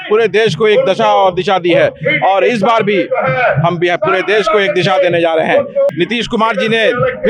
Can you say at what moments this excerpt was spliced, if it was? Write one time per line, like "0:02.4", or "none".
0:05.9